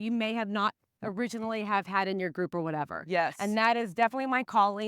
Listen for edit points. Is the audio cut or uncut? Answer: cut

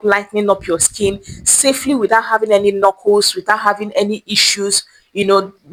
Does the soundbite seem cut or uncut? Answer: uncut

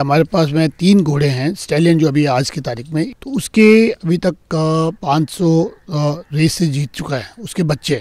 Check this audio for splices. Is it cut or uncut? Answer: cut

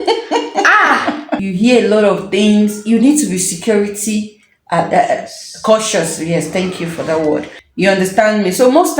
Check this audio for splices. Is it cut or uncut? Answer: cut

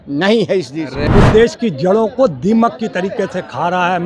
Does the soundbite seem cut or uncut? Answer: cut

